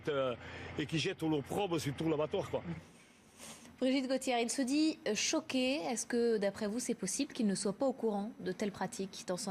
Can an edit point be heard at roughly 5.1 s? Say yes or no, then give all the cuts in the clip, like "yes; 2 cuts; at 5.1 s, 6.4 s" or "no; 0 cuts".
no; 1 cut; at 2.0 s